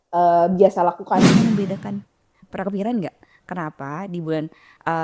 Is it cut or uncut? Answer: cut